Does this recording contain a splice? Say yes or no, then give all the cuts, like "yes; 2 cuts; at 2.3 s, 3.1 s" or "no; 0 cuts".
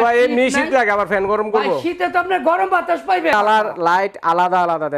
yes; 1 cut; at 3.3 s